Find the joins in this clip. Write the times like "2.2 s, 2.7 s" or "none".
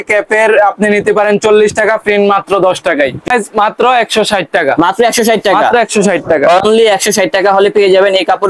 3.3 s